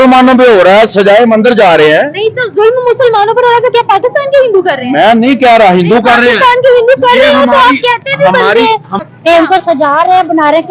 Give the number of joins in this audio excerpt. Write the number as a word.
one